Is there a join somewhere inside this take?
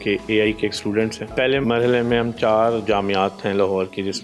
yes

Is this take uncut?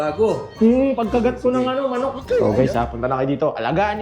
no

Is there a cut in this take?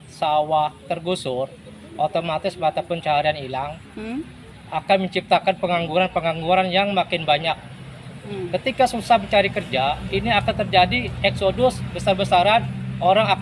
no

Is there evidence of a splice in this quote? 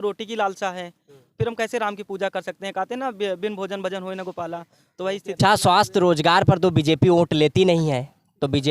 yes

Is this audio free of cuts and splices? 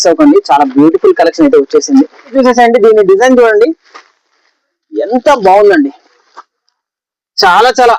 no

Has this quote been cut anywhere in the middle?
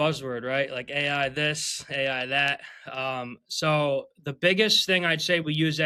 no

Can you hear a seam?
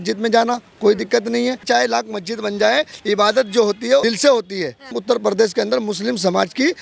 yes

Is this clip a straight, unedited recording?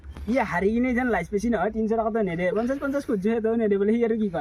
yes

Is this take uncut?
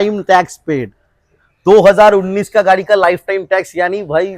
yes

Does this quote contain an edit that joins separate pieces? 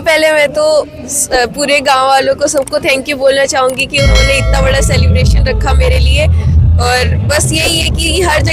no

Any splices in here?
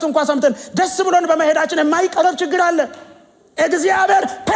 no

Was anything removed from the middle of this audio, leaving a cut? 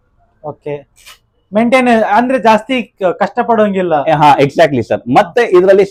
no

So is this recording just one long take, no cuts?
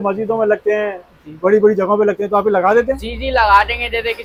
yes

